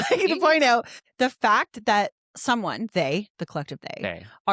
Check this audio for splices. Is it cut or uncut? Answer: cut